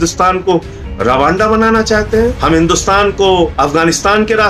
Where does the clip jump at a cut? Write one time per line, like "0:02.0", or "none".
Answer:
0:02.4
0:03.5